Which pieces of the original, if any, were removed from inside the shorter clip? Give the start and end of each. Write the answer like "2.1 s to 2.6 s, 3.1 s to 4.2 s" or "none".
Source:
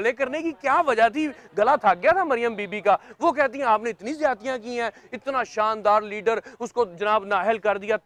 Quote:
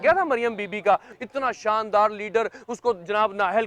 3.1 s to 5.0 s